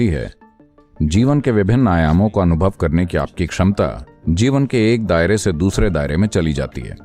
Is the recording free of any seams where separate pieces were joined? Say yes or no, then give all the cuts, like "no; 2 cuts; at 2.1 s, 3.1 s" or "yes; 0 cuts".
no; 1 cut; at 4.1 s